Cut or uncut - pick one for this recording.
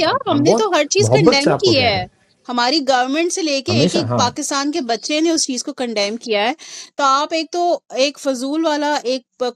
uncut